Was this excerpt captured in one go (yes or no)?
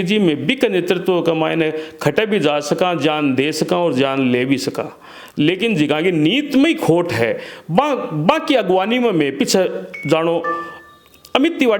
yes